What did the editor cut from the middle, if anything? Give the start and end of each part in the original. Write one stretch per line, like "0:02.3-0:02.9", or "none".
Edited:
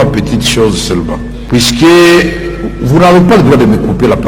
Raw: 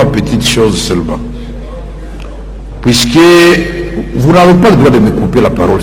0:01.3-0:02.6